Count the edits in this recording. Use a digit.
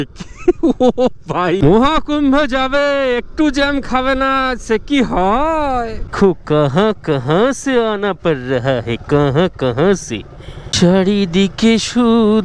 2